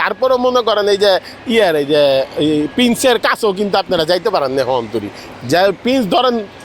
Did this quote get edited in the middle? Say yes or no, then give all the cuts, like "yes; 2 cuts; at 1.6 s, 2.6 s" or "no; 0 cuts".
no; 0 cuts